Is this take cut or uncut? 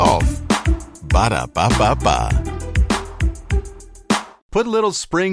cut